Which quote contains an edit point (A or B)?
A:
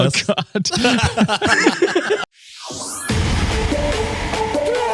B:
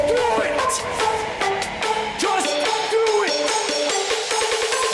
A